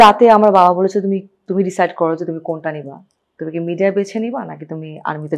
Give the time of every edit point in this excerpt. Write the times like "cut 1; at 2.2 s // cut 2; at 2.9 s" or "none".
none